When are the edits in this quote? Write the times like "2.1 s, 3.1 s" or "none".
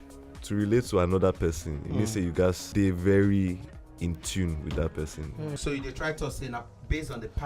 2.6 s, 5.6 s

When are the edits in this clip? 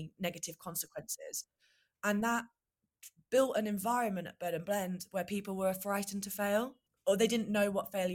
6.8 s

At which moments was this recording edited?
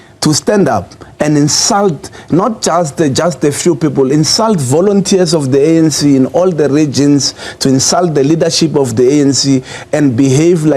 none

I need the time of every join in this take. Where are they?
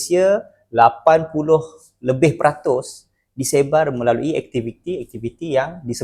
none

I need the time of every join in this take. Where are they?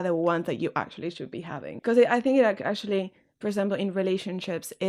1.7 s

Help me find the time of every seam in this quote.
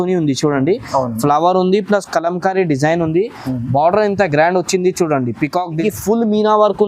5.8 s

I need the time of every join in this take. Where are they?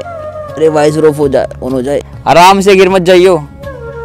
2.1 s

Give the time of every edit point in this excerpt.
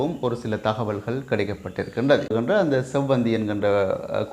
2.3 s

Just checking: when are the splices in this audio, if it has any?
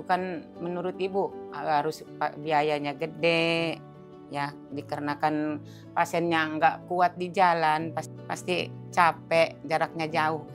none

